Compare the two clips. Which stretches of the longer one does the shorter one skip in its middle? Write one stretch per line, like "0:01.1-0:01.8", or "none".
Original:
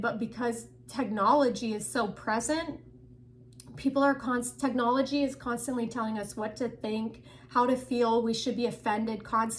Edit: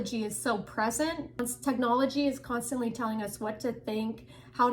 0:02.9-0:04.4

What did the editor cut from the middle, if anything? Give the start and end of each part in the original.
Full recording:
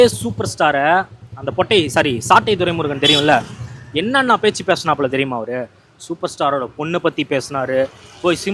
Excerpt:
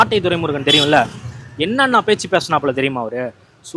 none

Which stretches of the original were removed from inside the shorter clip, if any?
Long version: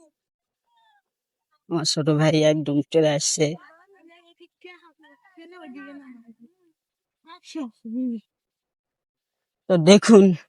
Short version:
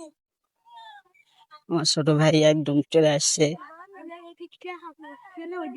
none

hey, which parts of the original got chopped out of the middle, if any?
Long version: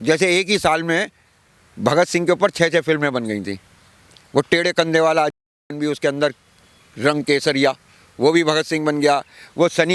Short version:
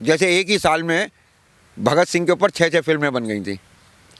none

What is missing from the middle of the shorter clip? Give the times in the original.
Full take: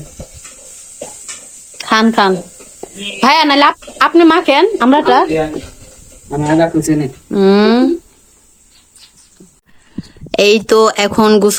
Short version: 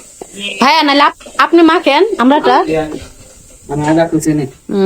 none

